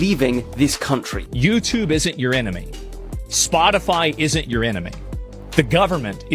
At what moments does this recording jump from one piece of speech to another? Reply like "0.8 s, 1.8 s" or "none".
1.1 s